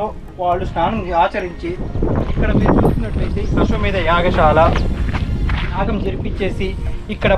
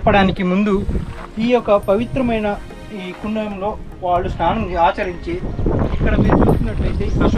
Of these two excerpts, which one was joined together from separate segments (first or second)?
first